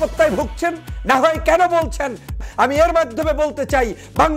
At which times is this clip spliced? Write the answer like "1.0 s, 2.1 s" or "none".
2.4 s